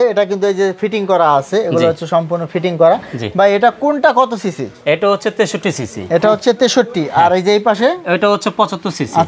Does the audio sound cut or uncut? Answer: uncut